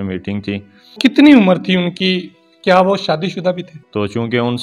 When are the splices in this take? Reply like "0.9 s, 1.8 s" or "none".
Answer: 0.9 s, 3.7 s